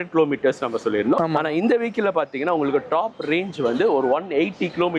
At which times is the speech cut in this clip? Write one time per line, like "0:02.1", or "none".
0:01.2